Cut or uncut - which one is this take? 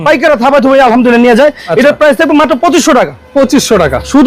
uncut